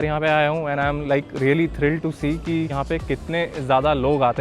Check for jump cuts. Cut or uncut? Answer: cut